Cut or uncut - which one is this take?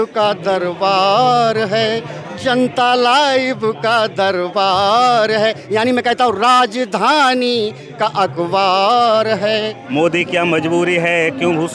cut